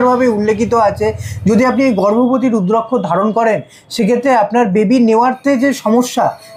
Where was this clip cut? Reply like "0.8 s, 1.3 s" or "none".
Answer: none